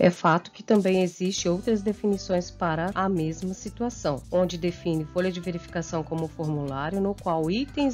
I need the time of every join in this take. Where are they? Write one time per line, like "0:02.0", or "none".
0:02.9
0:04.2